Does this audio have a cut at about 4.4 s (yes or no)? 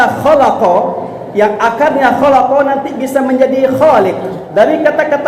yes